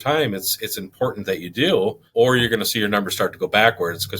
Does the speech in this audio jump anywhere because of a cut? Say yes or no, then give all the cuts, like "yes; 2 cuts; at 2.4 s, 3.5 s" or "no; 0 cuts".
yes; 1 cut; at 2.0 s